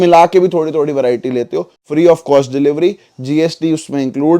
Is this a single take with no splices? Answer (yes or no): no